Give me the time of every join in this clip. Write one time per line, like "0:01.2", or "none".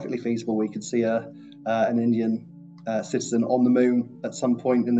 none